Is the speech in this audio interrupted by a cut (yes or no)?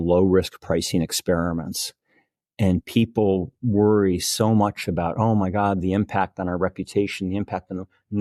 no